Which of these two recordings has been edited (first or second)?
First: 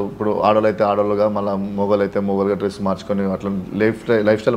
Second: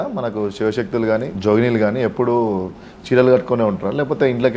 second